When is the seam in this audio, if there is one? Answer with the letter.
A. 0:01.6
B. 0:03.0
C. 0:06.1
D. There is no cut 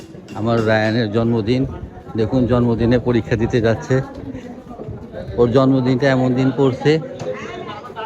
D